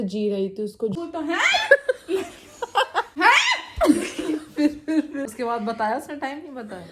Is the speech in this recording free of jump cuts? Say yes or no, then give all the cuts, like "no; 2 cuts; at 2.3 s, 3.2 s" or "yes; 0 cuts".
no; 3 cuts; at 1.0 s, 3.1 s, 5.2 s